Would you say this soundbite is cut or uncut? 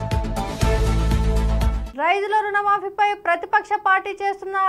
cut